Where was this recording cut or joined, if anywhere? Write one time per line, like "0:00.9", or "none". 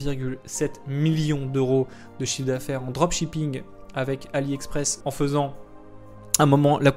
none

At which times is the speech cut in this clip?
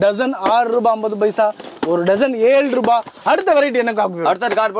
none

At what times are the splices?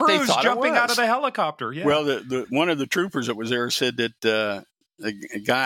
0:01.8

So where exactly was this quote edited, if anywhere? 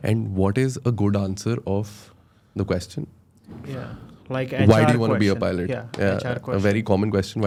none

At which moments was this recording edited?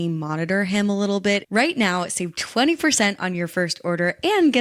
0:01.4

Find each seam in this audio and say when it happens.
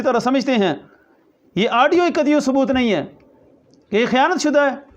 none

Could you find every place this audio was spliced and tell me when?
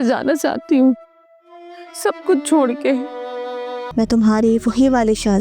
0:03.8

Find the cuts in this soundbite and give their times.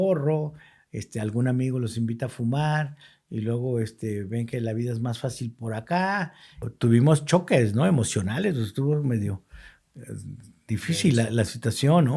0:06.7

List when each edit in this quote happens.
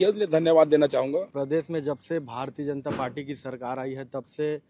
0:01.3

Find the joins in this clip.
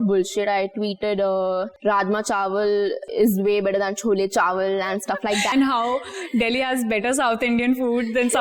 0:01.7
0:03.1
0:05.5

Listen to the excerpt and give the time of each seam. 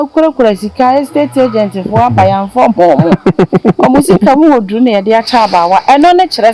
none

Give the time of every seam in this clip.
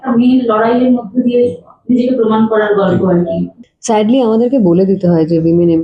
0:03.5

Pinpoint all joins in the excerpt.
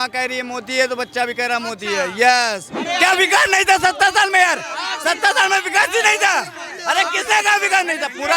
0:02.8

